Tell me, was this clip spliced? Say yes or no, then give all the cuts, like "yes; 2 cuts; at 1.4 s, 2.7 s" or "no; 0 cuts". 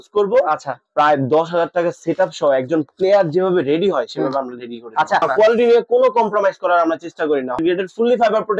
yes; 2 cuts; at 5.2 s, 7.6 s